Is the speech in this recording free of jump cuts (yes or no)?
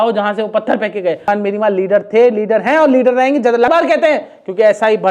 no